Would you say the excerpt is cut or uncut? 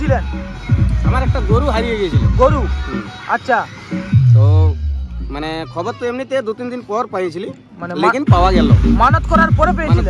uncut